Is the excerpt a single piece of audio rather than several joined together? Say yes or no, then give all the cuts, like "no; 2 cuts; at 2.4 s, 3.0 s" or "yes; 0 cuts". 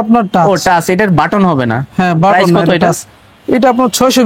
yes; 0 cuts